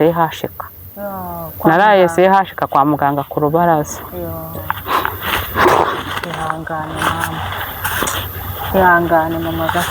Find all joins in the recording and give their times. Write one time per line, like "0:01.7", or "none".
none